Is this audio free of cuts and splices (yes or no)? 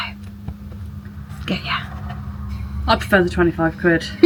yes